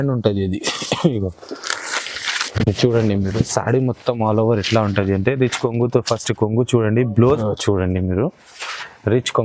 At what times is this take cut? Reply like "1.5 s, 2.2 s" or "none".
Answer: 7.4 s